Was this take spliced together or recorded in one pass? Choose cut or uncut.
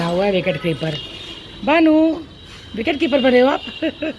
uncut